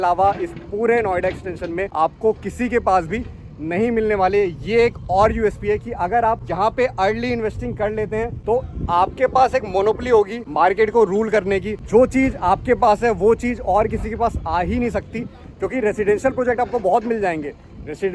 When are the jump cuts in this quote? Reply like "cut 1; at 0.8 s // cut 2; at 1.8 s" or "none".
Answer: cut 1; at 1.9 s // cut 2; at 6.5 s // cut 3; at 8.4 s // cut 4; at 10.4 s // cut 5; at 11.7 s